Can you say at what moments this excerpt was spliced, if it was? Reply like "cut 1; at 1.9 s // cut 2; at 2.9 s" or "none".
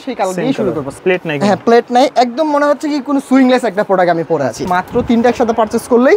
cut 1; at 0.9 s // cut 2; at 4.7 s